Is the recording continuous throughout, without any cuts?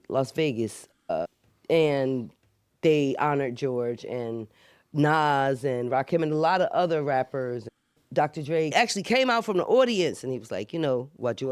no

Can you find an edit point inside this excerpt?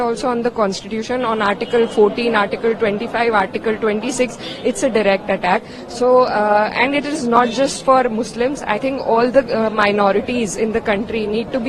no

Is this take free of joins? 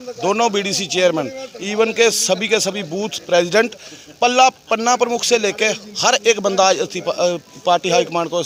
yes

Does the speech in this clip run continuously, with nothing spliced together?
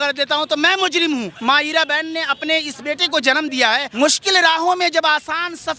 no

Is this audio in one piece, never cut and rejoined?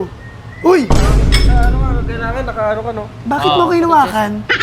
yes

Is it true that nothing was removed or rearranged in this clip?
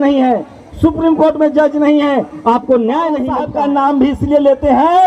no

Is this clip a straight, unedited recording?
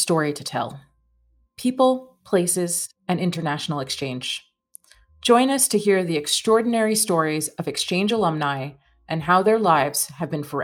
yes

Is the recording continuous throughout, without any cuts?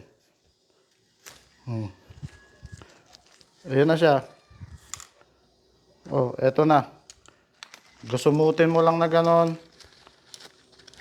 yes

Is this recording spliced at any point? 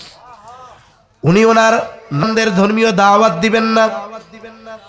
yes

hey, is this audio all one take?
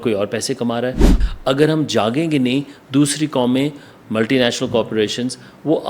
no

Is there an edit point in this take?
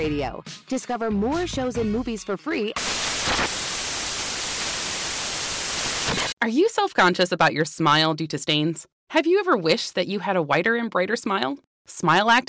no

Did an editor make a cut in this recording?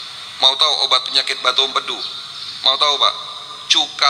no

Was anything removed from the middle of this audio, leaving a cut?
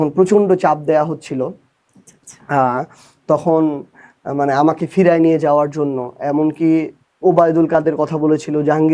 no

